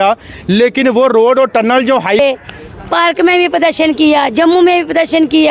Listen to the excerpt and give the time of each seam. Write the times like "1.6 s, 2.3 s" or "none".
2.2 s